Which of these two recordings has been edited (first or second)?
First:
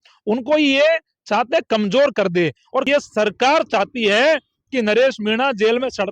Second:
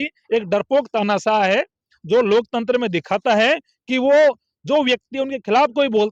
first